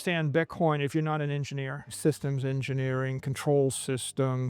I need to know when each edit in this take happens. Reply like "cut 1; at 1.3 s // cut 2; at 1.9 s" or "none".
cut 1; at 1.8 s